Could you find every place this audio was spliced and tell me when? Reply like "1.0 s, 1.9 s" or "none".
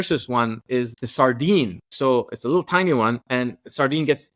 1.0 s, 1.9 s